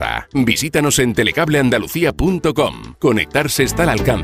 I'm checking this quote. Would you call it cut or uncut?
cut